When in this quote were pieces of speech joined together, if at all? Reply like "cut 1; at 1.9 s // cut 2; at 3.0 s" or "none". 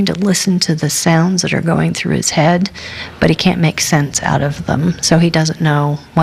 none